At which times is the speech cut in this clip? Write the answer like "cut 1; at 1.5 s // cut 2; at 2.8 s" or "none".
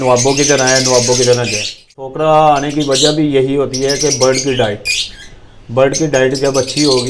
cut 1; at 2.0 s